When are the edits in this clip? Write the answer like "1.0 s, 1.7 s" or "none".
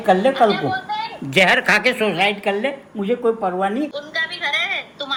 none